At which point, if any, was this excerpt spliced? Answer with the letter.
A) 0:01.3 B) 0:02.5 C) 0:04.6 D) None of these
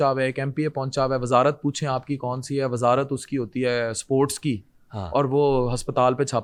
D